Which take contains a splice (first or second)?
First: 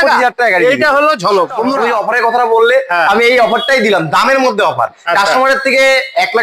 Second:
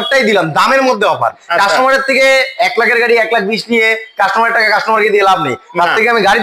first